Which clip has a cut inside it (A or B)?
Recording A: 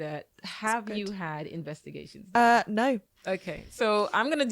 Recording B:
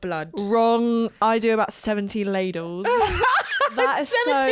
A